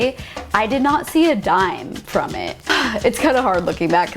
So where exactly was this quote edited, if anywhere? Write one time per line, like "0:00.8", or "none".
0:02.7